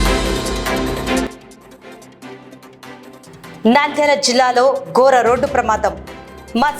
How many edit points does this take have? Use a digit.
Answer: 2